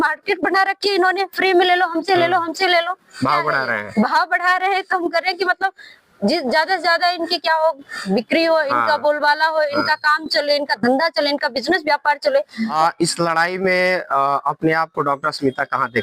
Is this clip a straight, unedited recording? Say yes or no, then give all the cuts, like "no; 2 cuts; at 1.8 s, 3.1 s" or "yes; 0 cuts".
no; 1 cut; at 12.7 s